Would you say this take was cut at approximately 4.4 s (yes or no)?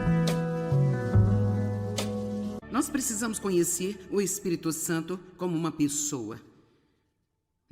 no